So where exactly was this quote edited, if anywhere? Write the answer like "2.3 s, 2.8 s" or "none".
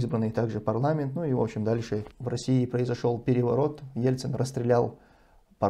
2.1 s